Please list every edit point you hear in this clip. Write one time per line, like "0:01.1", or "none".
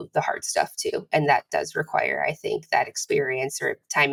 none